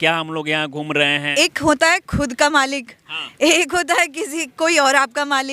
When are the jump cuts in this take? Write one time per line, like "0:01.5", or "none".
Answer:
0:01.3